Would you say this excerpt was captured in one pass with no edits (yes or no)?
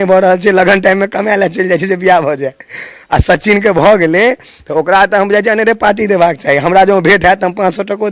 yes